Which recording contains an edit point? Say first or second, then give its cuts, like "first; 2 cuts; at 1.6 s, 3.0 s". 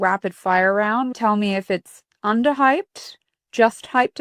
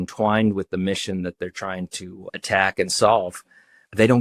first; 1 cut; at 1.1 s